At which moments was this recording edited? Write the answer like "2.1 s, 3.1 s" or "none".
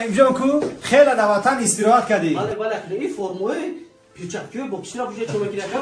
none